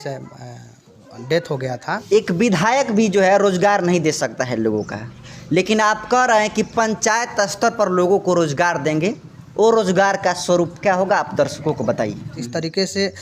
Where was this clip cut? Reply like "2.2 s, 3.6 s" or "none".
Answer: 2.0 s, 12.3 s